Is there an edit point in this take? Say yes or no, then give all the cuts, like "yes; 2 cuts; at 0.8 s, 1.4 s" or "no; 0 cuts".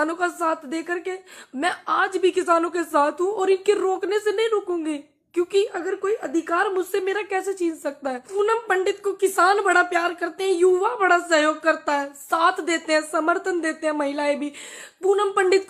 yes; 1 cut; at 8.3 s